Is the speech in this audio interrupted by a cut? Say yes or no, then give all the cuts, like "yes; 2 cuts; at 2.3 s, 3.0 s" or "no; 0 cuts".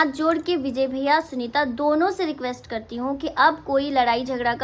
no; 0 cuts